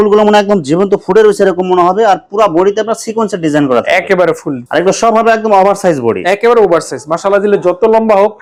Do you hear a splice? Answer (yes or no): no